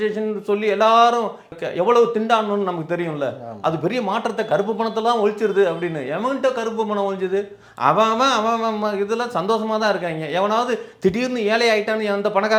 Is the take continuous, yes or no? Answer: yes